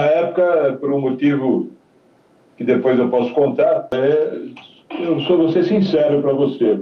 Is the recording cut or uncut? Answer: cut